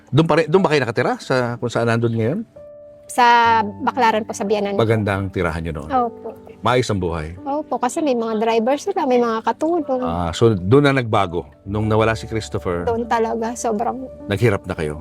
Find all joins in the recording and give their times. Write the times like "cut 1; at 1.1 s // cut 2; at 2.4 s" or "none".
cut 1; at 2.7 s